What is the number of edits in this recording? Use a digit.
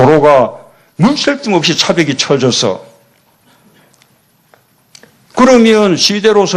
0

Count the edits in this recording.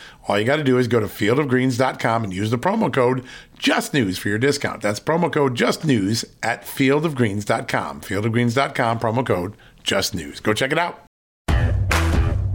1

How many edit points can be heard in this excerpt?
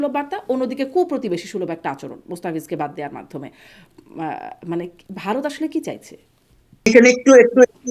1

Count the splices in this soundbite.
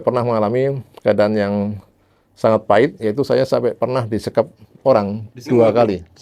0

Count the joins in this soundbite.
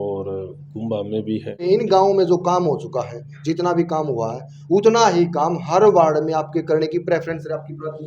1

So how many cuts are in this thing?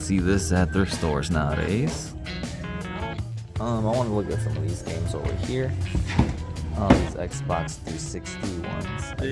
0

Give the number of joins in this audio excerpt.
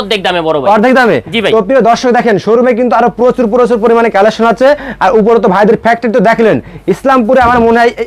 0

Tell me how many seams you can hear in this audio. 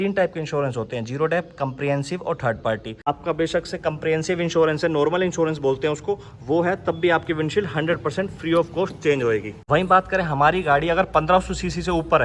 2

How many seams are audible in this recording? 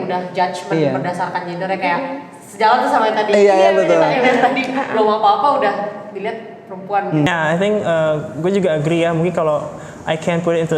1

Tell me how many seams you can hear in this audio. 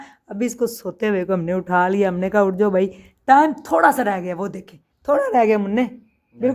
0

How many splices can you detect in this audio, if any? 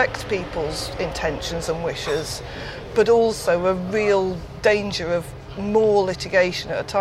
0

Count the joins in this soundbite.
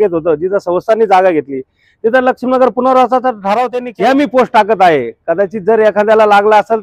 1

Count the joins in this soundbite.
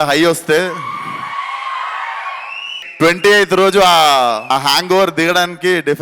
2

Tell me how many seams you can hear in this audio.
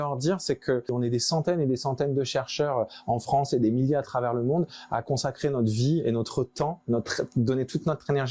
1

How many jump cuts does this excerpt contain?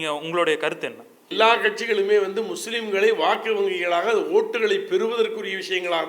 1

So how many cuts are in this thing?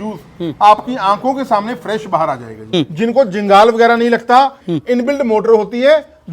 2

